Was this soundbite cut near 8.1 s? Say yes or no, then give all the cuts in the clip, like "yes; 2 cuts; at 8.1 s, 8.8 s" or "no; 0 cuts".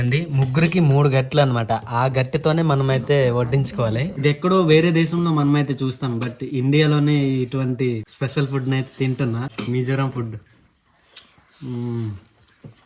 yes; 3 cuts; at 4.2 s, 8.1 s, 9.5 s